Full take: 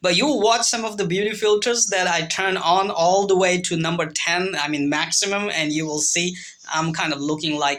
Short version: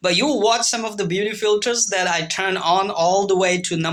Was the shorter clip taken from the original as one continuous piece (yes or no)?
yes